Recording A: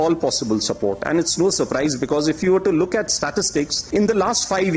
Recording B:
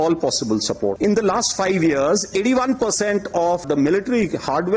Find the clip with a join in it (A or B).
B